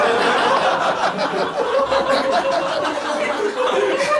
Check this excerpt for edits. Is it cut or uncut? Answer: uncut